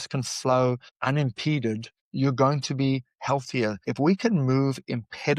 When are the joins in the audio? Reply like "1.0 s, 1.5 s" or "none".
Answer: 0.9 s, 2.0 s, 3.9 s